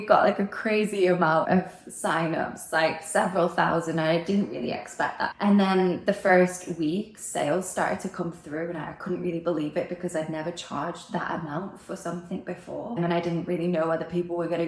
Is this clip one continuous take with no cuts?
no; 3 cuts; at 1.4 s, 5.3 s, 13.0 s

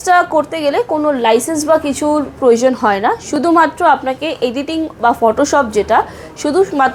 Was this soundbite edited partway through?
no; 0 cuts

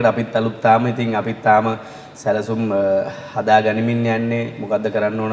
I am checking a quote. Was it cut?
no; 0 cuts

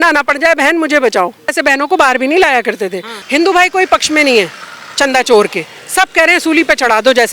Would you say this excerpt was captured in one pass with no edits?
no; 2 cuts; at 1.5 s, 3.1 s

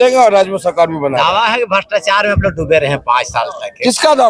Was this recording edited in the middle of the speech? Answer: no; 0 cuts

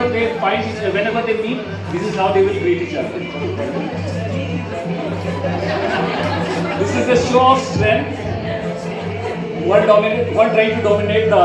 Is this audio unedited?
yes; 0 cuts

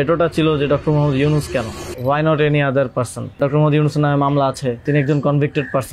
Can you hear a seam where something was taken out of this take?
yes; 3 cuts; at 1.8 s, 3.4 s, 4.8 s

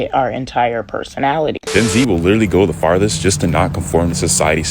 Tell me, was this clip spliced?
yes; 1 cut; at 1.6 s

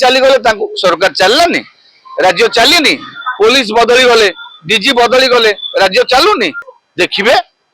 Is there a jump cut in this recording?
yes; 1 cut; at 6.7 s

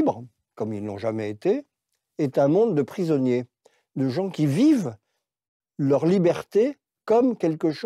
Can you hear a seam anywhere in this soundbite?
no; 0 cuts

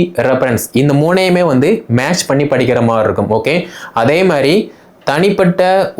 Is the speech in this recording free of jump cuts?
yes; 0 cuts

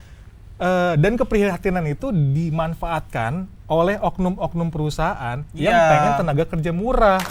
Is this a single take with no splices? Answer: yes; 0 cuts

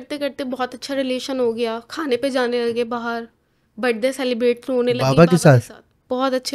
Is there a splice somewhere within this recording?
no; 0 cuts

